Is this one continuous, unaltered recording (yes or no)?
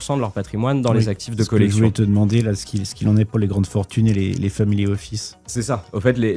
yes